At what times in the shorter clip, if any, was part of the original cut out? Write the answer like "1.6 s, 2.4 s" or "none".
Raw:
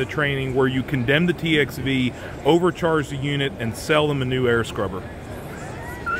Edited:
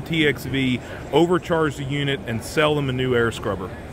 none